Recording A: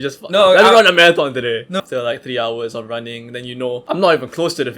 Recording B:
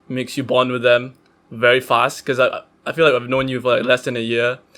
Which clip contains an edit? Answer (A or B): A